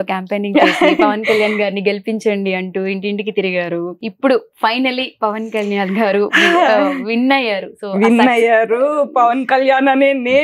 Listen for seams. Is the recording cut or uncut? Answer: cut